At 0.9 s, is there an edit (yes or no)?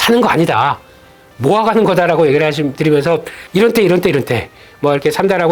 no